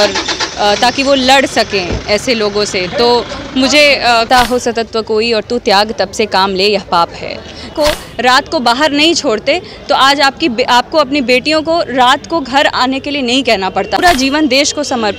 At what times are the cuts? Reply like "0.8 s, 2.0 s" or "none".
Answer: 4.3 s, 7.7 s, 14.0 s